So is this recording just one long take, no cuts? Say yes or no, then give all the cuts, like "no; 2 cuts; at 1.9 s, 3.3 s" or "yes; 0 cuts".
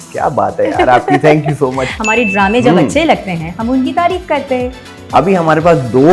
no; 2 cuts; at 1.9 s, 4.8 s